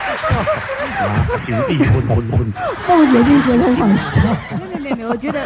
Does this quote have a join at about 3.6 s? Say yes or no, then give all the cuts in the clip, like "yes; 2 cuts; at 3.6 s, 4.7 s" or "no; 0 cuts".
no; 0 cuts